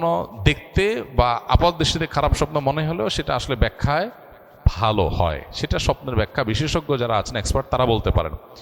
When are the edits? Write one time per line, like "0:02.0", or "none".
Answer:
none

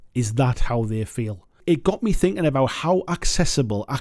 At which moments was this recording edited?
0:01.6

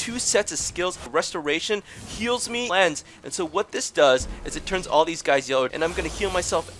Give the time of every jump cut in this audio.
0:01.0
0:02.7
0:05.7

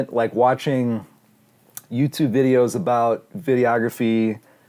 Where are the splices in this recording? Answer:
none

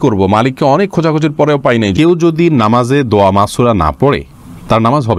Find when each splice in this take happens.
0:01.9

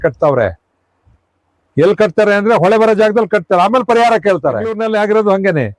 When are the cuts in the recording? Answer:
0:04.8

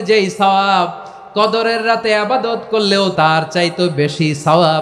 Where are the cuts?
0:03.1

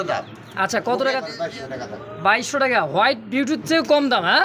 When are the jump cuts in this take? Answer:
0:01.3

